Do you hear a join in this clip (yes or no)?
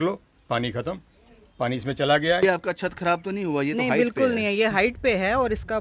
yes